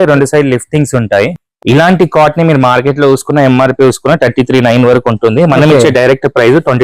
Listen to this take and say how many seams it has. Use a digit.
1